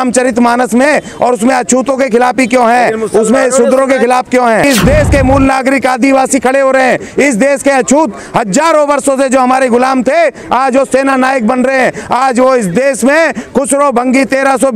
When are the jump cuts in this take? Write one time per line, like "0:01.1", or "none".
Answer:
0:04.6